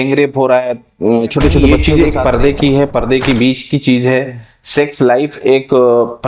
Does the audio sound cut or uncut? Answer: cut